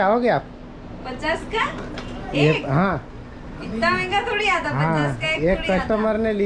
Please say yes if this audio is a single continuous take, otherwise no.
yes